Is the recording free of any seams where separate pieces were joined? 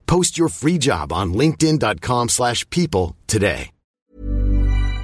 no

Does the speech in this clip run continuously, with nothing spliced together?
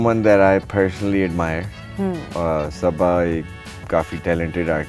yes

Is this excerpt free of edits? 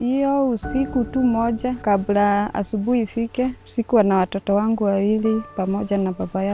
no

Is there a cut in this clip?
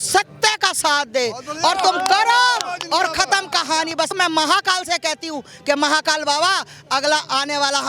yes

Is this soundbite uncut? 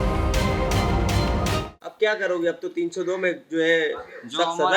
yes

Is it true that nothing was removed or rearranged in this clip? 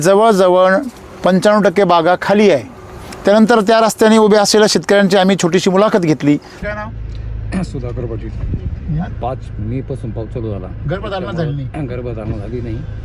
no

